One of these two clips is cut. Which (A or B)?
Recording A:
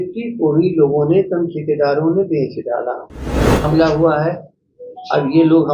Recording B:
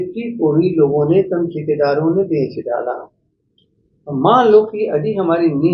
A